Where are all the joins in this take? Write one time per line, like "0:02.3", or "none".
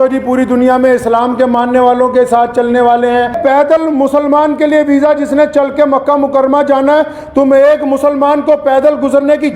0:03.3